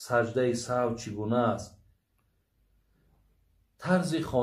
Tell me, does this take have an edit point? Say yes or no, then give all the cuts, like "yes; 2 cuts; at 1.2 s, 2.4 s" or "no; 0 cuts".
no; 0 cuts